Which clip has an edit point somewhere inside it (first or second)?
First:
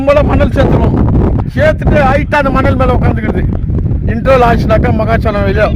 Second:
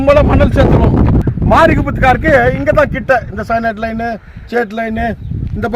second